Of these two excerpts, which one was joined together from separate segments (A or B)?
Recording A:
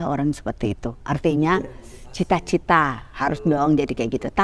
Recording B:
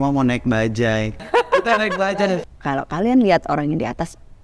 B